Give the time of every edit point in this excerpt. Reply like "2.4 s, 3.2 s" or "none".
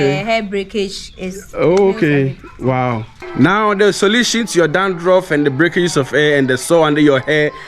3.2 s

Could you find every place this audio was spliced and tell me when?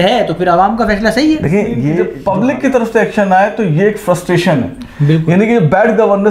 2.1 s

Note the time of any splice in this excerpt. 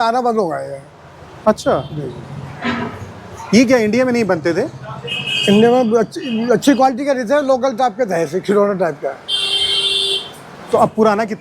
none

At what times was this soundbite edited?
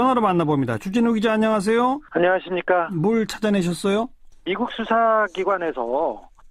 none

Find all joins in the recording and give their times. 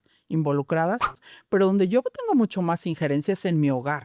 1.3 s

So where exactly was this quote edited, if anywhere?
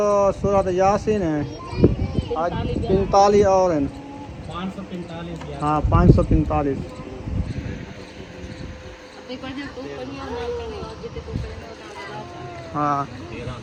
none

